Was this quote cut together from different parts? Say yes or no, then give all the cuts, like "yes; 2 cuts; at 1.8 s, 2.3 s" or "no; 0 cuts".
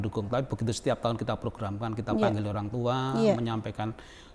no; 0 cuts